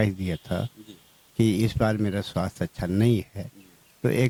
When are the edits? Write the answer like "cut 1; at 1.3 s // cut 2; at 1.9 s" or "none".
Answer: none